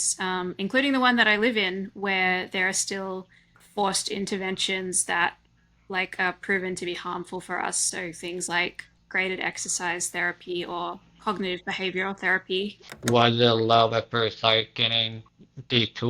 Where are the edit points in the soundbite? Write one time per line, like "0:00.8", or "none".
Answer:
0:12.8

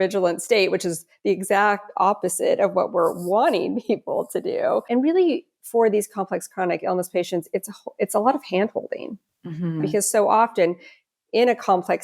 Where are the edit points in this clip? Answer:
0:04.9
0:09.9

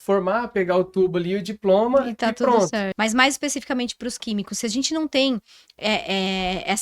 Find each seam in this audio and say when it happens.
0:02.9

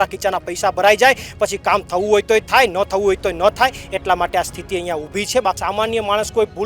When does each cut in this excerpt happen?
0:05.6

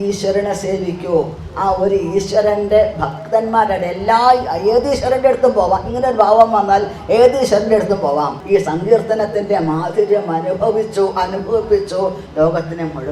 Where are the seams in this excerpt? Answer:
0:08.4

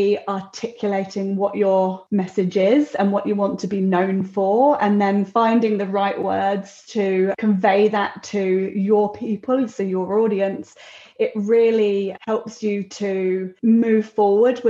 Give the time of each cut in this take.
0:02.0
0:07.4
0:12.2
0:13.5

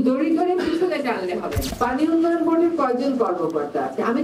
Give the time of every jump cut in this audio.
0:01.7

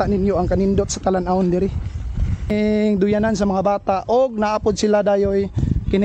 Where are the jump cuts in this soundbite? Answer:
0:02.5

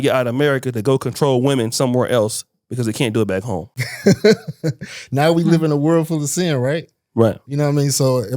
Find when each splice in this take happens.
0:03.8

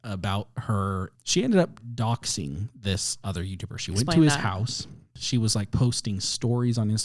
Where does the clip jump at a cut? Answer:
0:01.0
0:05.1

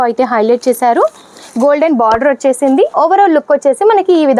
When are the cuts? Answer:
none

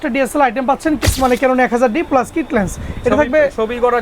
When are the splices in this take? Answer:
0:01.0

